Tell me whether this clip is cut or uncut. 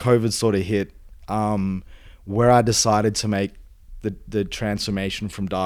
uncut